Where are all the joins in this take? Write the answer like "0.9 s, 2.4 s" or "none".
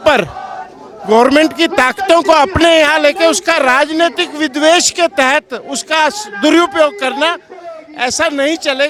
none

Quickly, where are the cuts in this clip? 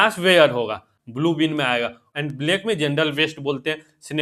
1.0 s, 2.0 s

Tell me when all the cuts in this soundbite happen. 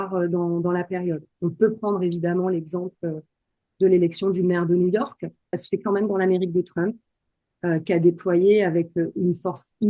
5.6 s

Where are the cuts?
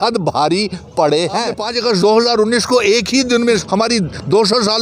1.6 s, 3.6 s

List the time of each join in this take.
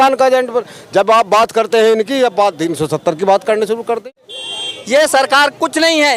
4.5 s

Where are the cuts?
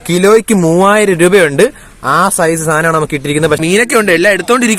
3.6 s

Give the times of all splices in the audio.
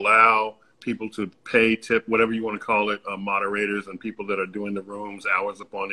none

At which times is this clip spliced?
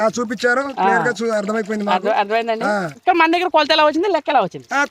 2.9 s

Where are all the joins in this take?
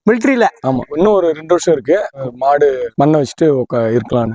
2.2 s

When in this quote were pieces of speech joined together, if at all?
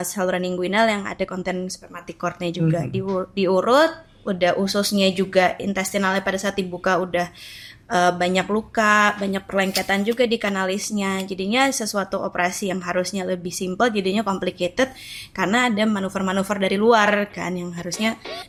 none

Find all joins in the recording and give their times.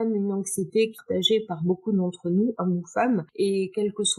1.0 s, 3.3 s

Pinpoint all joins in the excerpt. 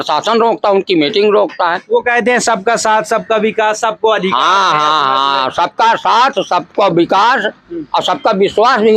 none

